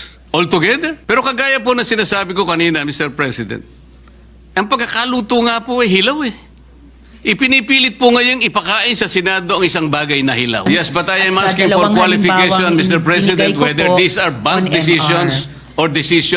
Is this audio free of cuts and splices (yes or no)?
no